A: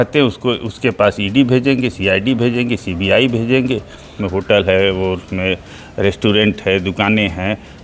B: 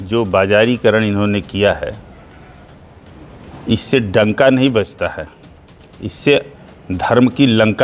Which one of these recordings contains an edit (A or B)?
A